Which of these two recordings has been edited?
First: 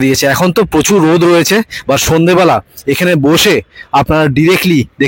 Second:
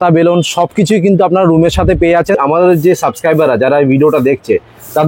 second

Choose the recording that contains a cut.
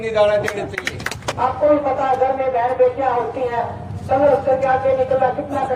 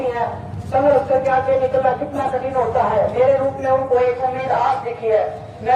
first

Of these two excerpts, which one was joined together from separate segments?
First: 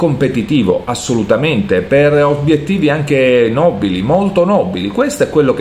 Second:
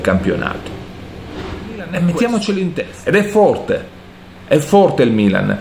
second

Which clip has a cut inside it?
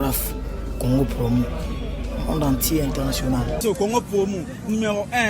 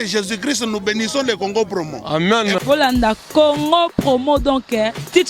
first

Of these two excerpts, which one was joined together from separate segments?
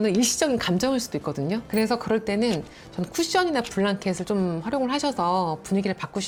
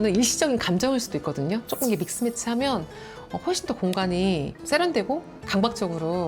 second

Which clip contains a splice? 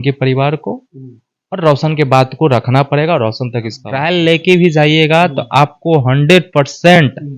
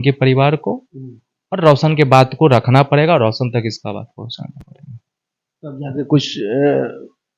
first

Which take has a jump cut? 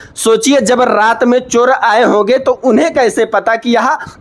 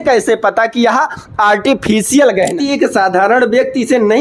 second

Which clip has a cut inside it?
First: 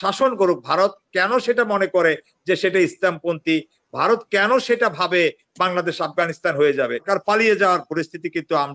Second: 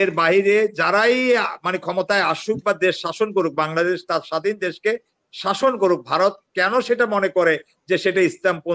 first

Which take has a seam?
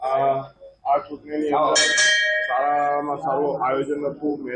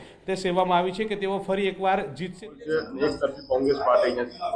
second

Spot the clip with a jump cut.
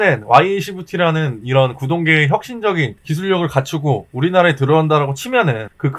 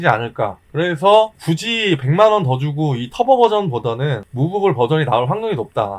second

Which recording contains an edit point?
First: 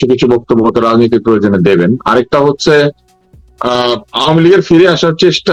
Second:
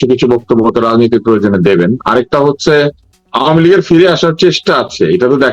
second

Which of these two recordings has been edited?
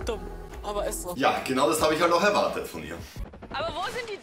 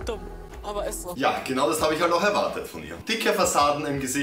second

